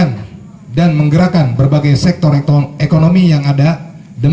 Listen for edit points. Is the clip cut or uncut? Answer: uncut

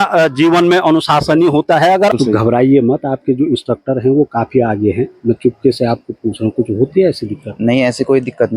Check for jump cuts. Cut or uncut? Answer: cut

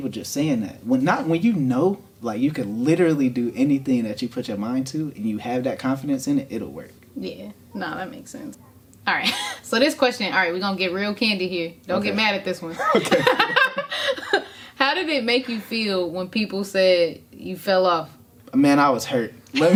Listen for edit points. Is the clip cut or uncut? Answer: uncut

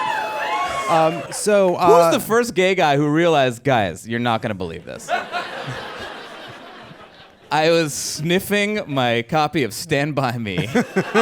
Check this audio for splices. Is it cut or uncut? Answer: cut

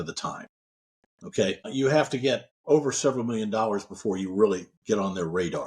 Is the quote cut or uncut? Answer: cut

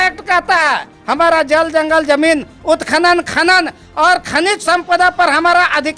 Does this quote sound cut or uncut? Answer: uncut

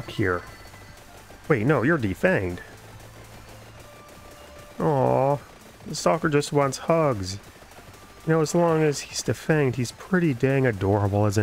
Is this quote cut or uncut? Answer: uncut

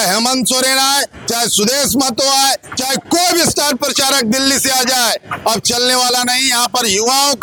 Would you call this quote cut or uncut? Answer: uncut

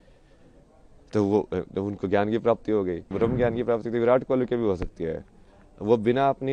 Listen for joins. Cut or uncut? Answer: cut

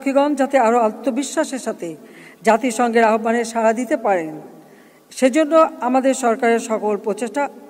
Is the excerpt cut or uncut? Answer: uncut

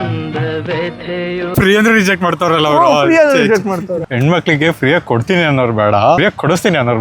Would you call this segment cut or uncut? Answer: cut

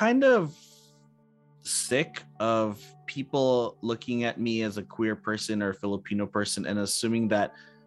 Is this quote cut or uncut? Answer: uncut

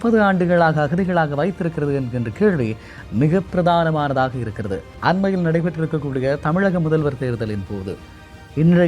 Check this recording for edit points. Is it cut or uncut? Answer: cut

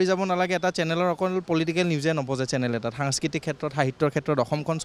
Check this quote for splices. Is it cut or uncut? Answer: uncut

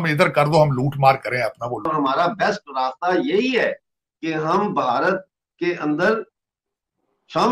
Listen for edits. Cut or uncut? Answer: cut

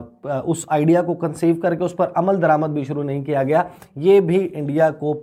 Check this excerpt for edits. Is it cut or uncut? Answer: uncut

